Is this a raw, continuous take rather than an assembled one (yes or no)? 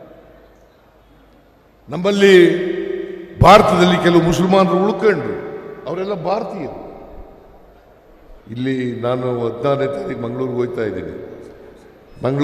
no